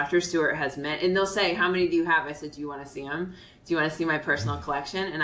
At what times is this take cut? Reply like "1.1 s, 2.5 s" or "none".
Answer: none